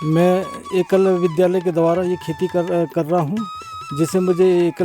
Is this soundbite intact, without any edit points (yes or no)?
yes